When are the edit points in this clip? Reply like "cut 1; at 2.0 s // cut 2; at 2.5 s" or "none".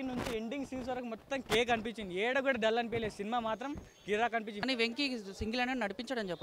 cut 1; at 4.6 s